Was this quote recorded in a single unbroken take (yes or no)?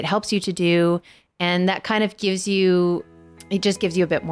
no